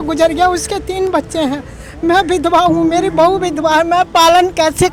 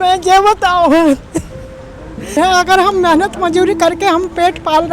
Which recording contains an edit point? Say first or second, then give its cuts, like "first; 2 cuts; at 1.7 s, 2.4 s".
second; 1 cut; at 2.4 s